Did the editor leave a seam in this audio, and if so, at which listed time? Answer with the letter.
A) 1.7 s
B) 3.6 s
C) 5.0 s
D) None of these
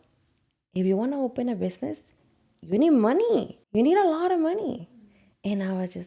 B